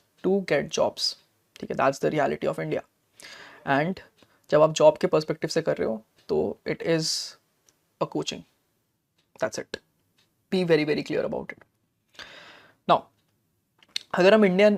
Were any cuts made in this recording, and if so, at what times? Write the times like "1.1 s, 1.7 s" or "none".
none